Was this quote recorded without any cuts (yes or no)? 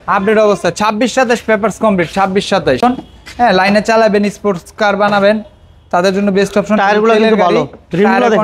no